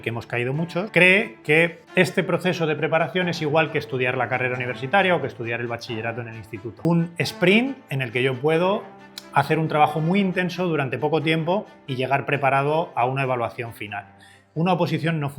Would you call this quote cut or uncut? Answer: cut